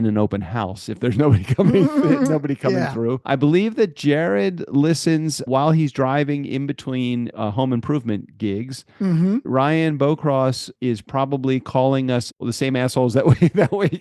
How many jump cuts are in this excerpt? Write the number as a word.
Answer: six